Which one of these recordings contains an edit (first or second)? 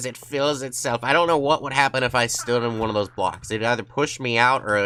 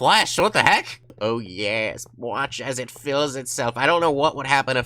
second